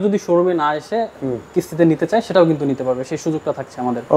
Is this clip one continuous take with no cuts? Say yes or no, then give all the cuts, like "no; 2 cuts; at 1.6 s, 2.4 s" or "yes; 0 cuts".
yes; 0 cuts